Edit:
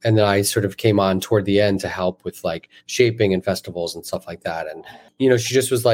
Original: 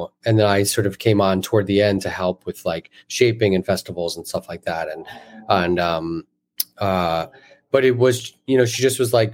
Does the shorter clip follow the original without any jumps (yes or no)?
no